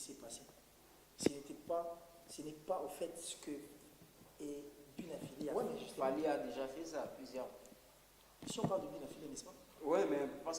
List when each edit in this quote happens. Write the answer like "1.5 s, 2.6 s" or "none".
5.5 s